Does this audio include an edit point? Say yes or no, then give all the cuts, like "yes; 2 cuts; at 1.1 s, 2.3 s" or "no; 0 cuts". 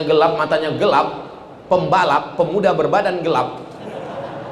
no; 0 cuts